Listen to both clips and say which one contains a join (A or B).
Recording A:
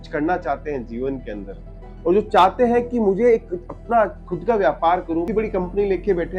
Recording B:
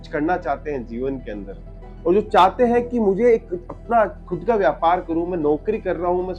A